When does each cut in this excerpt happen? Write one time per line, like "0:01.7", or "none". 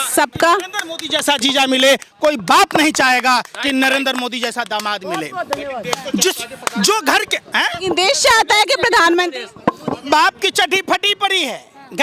none